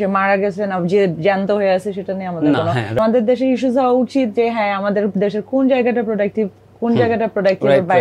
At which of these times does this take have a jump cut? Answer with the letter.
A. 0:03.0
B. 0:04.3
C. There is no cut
A